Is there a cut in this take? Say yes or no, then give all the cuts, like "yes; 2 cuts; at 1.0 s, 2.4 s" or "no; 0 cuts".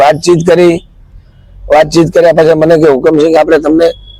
no; 0 cuts